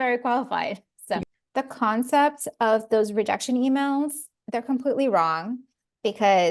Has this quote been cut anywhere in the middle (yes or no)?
yes